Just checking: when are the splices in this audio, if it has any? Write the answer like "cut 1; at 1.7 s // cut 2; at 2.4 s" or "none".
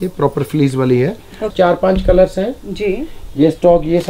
cut 1; at 1.5 s